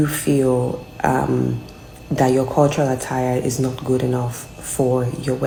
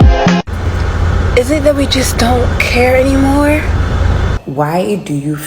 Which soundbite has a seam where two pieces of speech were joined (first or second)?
second